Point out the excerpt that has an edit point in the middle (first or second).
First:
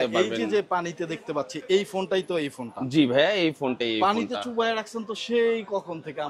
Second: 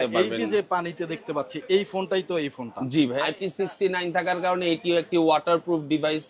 second